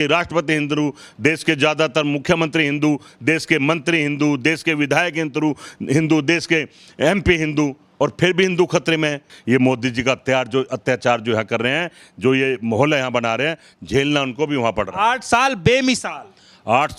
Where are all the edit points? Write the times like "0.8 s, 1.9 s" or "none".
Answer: none